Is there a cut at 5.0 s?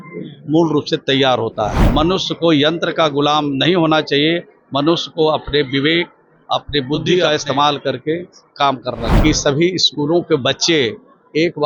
no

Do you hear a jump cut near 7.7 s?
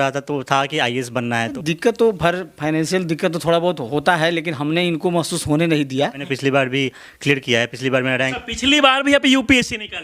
no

